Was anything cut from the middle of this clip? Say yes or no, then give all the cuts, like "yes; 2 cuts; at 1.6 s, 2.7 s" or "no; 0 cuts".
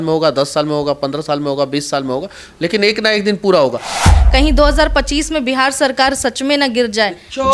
yes; 1 cut; at 4.1 s